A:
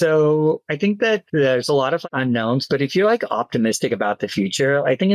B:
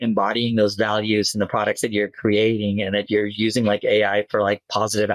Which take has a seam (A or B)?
A